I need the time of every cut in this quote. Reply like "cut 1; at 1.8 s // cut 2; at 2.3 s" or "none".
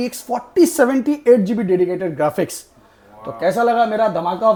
none